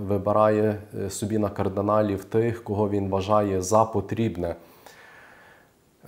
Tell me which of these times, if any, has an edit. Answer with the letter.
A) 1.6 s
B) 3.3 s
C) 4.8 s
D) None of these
D